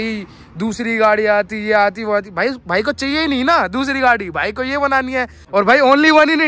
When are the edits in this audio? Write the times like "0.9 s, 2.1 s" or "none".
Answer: 5.4 s